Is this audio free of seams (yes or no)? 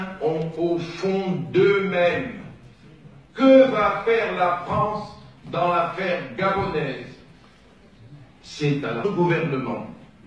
yes